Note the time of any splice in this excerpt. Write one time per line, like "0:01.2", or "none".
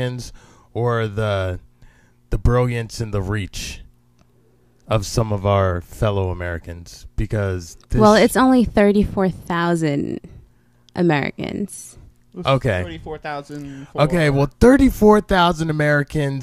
0:01.5